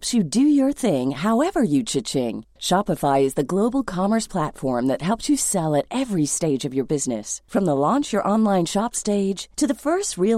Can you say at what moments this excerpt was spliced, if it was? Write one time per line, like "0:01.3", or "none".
none